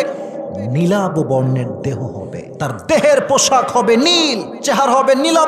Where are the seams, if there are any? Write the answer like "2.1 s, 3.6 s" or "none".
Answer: 2.5 s, 4.5 s